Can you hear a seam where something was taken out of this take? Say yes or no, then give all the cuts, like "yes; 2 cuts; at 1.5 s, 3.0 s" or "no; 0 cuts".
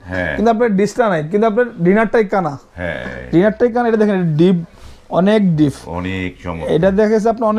no; 0 cuts